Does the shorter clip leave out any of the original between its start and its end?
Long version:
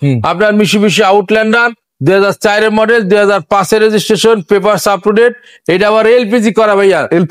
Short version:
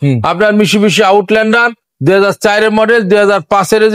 no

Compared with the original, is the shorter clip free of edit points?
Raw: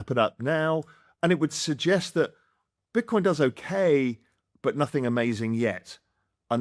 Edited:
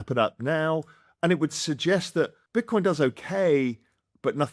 no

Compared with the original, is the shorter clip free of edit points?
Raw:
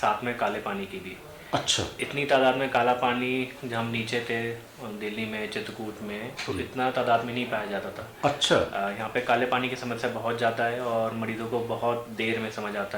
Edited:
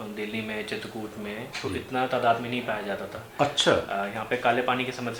yes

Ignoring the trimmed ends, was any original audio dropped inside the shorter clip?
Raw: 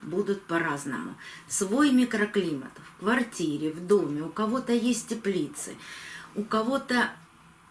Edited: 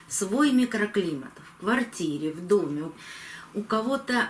yes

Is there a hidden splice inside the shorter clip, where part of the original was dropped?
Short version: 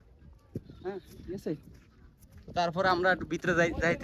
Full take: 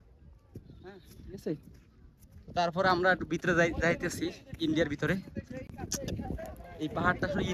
no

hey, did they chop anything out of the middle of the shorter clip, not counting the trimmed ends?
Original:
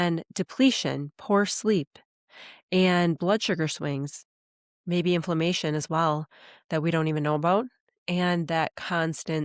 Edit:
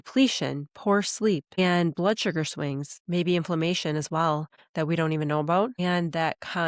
yes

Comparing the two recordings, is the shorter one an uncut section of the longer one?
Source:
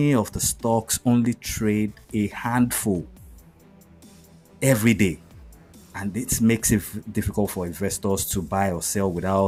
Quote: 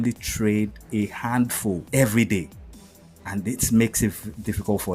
no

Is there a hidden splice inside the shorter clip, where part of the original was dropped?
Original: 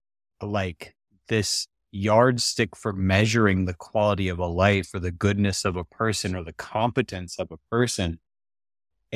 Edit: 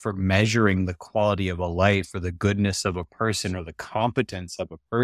no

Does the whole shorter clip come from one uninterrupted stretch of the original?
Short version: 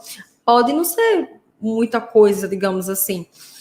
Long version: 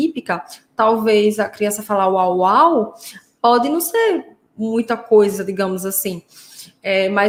yes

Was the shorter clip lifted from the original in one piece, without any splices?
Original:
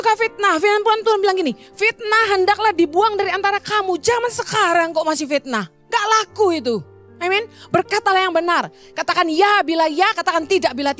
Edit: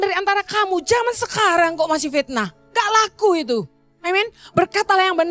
yes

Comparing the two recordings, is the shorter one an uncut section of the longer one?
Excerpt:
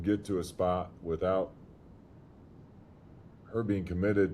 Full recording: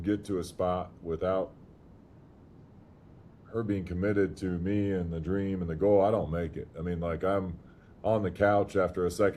yes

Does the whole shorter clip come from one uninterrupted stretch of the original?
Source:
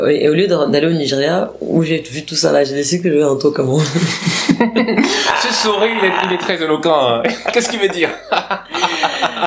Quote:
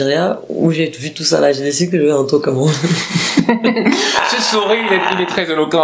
yes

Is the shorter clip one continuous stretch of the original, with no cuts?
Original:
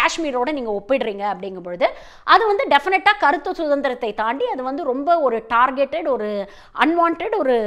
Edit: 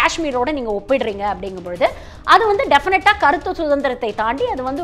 yes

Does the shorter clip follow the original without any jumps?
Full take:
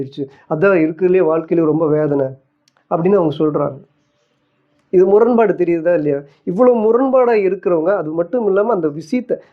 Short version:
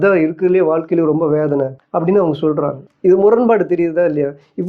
no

